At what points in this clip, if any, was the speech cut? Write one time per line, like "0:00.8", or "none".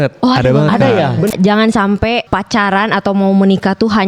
0:01.3
0:02.3